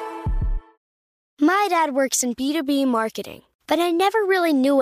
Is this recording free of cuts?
no; 1 cut; at 0.9 s

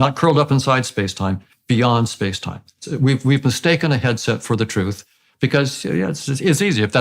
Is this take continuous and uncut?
no; 1 cut; at 2.8 s

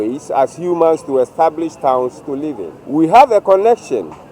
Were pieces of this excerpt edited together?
yes; 1 cut; at 2.7 s

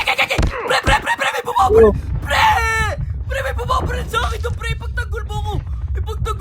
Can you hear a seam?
no; 0 cuts

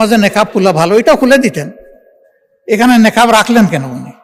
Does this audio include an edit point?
no; 0 cuts

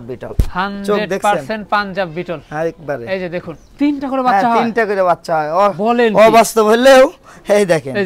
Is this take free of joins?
no; 1 cut; at 3.6 s

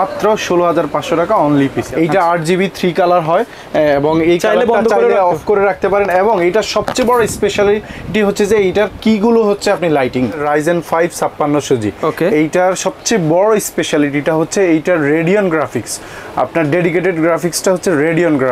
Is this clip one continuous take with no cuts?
no; 2 cuts; at 1.8 s, 10.4 s

